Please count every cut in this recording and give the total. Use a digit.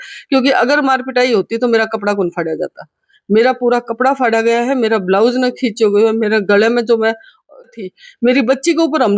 1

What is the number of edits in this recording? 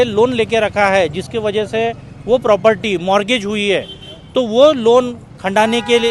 0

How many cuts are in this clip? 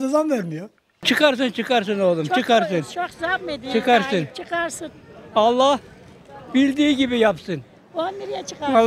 1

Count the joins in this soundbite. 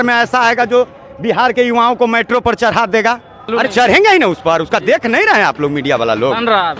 1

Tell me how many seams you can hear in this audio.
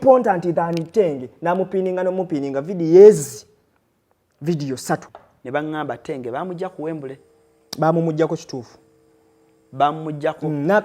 1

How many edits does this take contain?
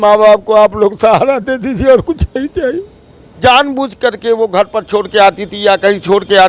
1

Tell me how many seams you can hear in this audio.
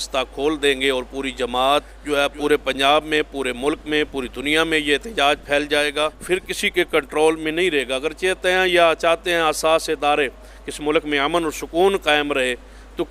2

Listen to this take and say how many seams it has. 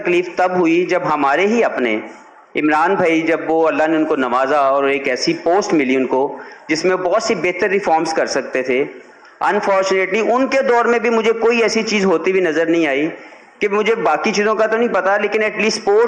0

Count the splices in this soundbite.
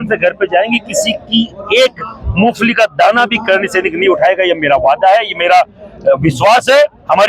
0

